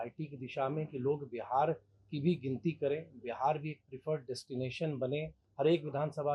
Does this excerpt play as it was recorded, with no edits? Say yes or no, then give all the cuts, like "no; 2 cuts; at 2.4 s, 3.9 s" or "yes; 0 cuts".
no; 1 cut; at 5.4 s